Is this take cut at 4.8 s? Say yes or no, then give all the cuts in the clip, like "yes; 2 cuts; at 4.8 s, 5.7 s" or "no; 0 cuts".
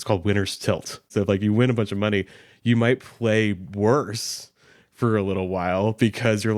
no; 1 cut; at 1.1 s